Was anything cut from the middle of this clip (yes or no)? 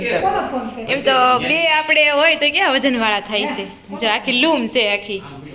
no